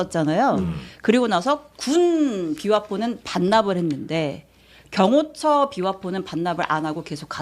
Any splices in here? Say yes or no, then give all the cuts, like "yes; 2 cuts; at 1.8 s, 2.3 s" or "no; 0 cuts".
no; 0 cuts